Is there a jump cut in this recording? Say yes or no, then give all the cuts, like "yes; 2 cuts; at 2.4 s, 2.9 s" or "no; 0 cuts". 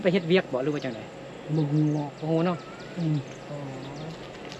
no; 0 cuts